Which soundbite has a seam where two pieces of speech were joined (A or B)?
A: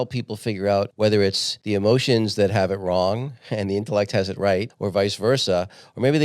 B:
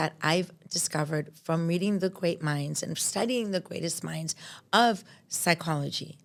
A